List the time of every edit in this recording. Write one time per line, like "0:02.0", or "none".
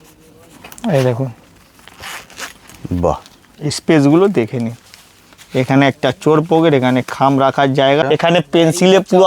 0:08.0

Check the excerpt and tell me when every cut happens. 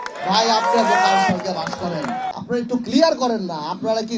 0:02.4

